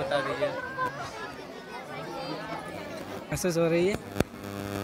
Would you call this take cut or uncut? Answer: cut